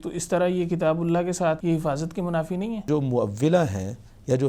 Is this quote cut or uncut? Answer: cut